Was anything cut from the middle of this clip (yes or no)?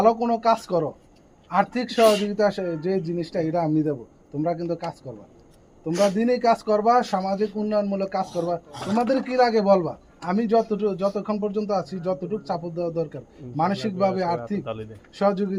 no